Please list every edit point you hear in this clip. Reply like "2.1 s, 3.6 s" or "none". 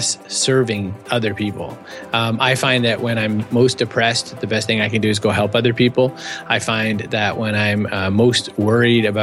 1.0 s